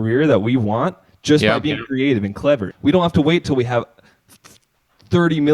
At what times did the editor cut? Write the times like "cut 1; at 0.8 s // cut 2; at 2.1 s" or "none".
cut 1; at 2.7 s